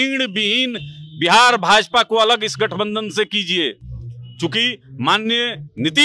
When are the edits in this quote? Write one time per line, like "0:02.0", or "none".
none